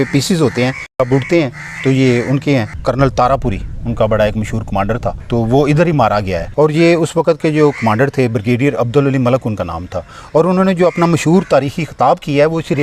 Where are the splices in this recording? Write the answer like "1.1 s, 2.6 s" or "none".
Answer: 2.8 s, 5.2 s, 6.4 s